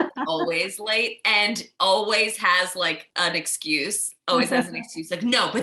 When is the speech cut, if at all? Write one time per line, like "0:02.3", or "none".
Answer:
0:03.0

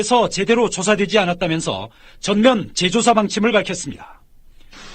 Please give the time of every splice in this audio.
0:01.4

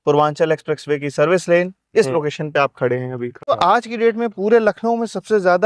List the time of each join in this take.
0:03.5

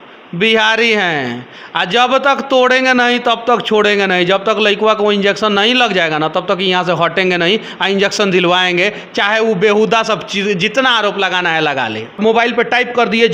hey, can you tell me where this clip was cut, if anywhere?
0:12.2

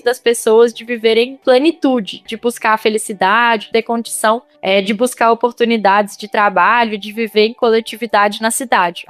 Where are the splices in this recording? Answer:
0:02.3
0:03.6

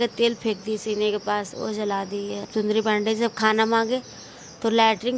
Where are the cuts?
0:02.5

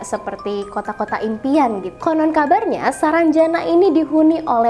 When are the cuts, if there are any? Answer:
0:01.9

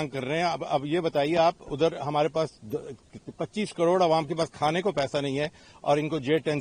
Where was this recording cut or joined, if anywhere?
none

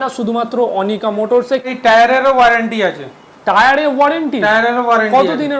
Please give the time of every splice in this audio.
0:01.7

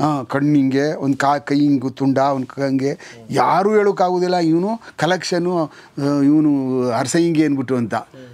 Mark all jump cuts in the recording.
none

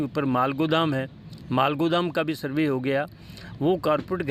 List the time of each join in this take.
none

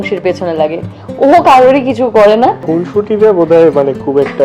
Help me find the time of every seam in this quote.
0:02.6

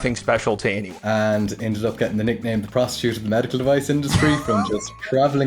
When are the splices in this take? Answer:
0:01.0

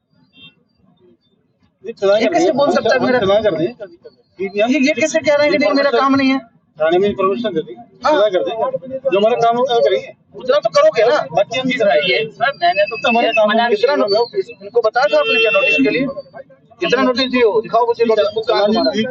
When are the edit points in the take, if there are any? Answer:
none

